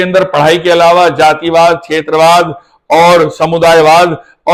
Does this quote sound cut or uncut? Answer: uncut